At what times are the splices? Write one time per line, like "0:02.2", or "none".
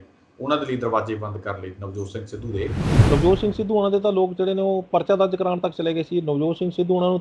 0:02.9